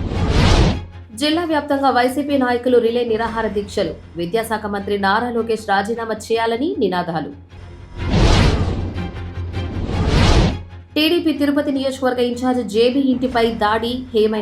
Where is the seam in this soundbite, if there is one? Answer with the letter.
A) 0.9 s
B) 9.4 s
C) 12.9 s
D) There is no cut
A